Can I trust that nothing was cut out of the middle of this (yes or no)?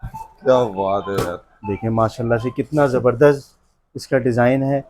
yes